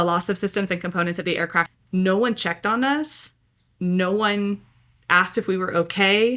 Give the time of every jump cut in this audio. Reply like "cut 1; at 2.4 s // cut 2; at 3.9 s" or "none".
cut 1; at 1.7 s